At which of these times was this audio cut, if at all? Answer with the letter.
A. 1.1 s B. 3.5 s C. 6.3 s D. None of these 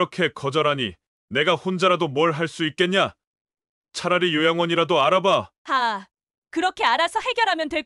D